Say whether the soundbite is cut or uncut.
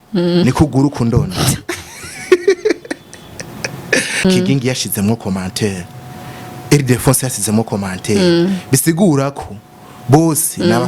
cut